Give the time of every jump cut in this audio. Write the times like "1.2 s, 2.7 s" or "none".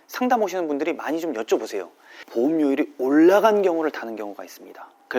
2.2 s